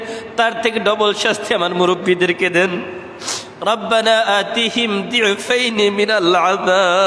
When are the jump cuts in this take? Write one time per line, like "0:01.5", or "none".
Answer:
none